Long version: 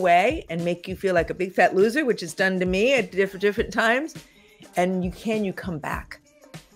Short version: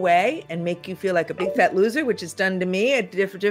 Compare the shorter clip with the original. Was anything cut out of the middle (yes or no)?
no